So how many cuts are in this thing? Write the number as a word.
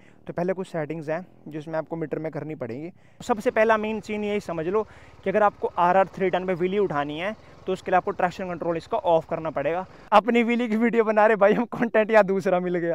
two